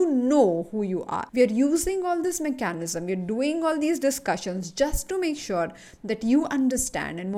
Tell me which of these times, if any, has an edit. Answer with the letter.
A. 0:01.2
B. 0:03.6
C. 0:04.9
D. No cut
A